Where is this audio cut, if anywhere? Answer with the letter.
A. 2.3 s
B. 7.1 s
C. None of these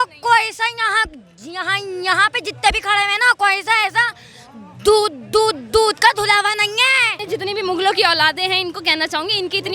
B